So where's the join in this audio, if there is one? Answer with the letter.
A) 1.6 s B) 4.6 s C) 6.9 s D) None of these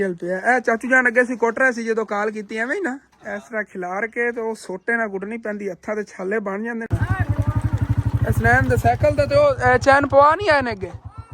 C